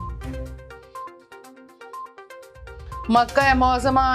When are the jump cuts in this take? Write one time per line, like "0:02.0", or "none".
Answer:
0:01.6